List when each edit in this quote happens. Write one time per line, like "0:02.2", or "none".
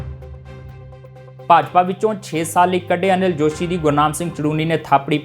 none